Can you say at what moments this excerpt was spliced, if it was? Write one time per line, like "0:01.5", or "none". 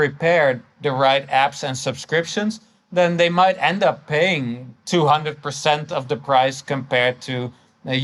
none

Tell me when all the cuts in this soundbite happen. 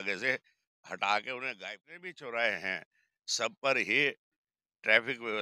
0:01.5

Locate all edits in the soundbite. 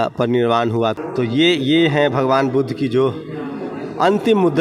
0:00.9

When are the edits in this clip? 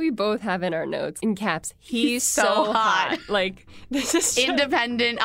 0:01.2

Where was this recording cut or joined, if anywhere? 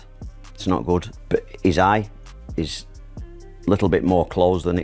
0:01.2

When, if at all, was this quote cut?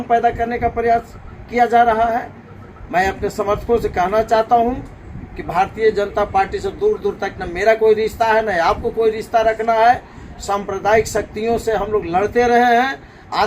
none

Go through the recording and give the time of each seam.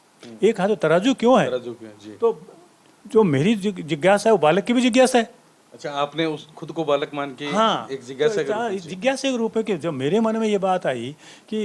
none

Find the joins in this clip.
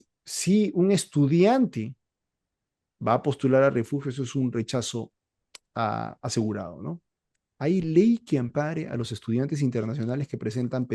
none

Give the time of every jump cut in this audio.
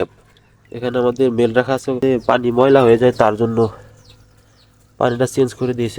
0:02.0

